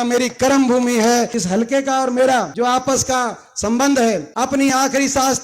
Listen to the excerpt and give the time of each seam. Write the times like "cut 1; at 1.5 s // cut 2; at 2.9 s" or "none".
cut 1; at 1.3 s // cut 2; at 2.5 s // cut 3; at 4.3 s